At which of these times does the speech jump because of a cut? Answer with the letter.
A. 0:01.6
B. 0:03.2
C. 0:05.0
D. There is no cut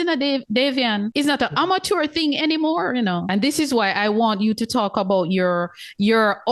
B